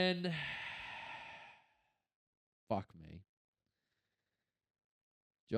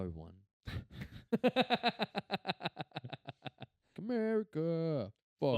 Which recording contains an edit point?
second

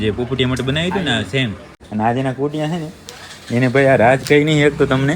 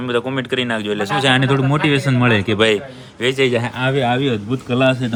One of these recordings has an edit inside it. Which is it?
first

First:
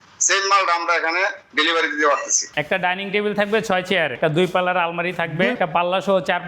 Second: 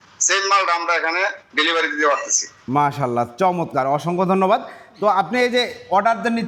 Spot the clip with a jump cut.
first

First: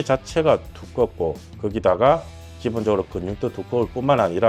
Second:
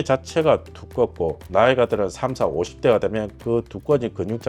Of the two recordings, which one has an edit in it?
second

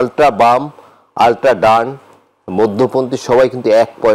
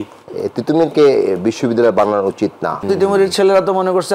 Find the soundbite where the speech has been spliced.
second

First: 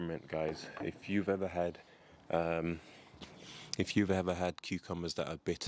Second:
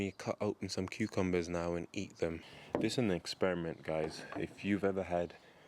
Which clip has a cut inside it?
second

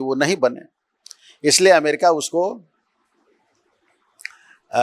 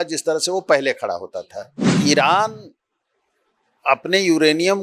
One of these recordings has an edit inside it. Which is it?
second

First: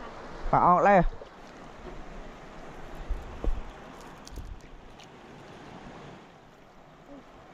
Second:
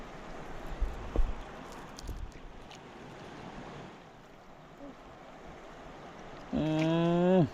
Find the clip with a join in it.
first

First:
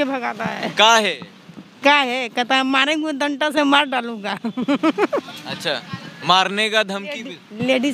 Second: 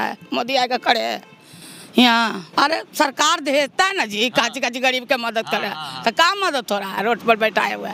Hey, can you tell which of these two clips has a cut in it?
second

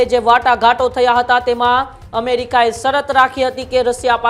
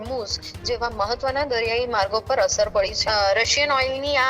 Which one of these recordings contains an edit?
second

